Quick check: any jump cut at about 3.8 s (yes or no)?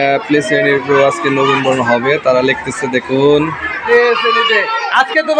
yes